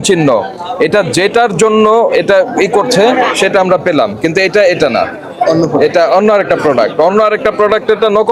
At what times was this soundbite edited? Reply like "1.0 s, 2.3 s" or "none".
none